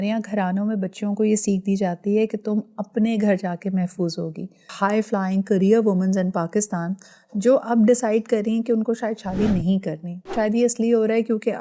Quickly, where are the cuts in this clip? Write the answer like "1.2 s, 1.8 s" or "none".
4.7 s, 10.3 s